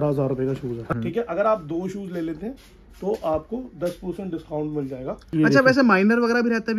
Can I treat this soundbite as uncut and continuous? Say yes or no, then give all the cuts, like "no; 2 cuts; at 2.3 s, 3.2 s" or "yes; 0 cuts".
no; 2 cuts; at 1.0 s, 5.3 s